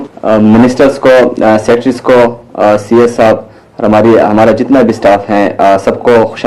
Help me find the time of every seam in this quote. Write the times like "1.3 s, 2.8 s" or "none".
2.8 s